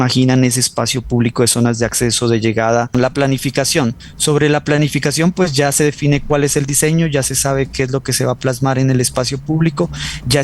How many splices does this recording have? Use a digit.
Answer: 1